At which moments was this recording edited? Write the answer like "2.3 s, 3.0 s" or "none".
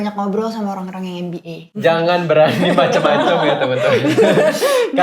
1.7 s